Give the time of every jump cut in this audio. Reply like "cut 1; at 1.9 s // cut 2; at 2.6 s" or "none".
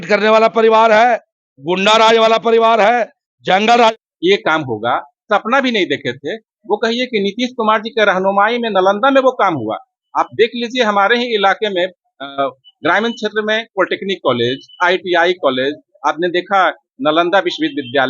cut 1; at 3.9 s